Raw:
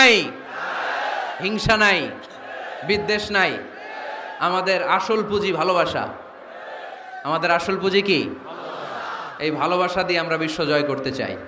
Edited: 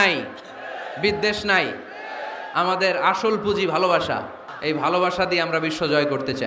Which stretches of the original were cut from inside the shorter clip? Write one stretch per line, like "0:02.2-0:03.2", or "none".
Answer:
0:06.3-0:09.2

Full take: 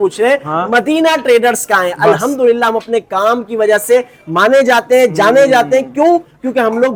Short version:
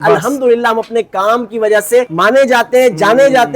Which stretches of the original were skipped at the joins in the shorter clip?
0:04.1-0:04.3

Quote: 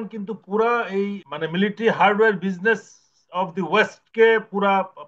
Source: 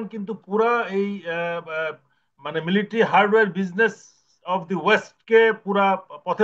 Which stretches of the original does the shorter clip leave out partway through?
0:01.2-0:02.3

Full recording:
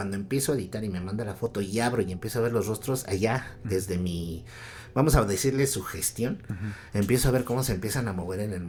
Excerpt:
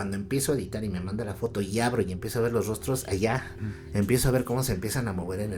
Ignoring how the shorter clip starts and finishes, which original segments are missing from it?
0:03.5-0:06.5

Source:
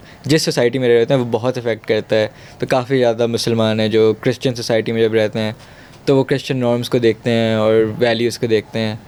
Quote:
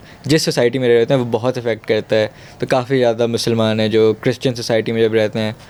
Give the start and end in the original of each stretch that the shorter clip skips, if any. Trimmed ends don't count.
none

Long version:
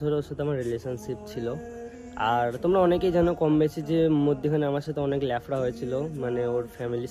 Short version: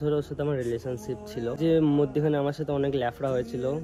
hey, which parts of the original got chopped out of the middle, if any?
0:01.5-0:03.8

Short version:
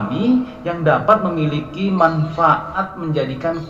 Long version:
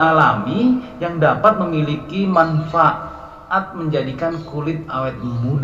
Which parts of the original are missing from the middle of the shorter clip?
0:03.0-0:03.5

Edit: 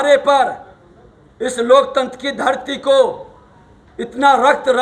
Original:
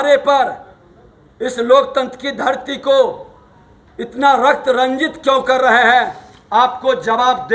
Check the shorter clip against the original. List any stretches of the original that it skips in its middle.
none

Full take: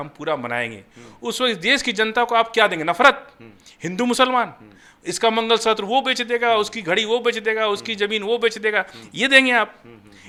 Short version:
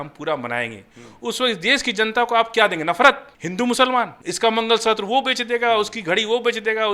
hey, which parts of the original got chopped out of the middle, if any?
0:03.4-0:03.8
0:04.6-0:05.0

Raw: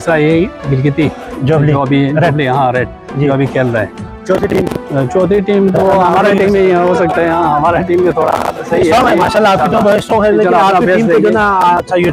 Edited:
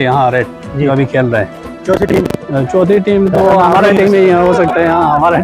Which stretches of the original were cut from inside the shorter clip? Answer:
none

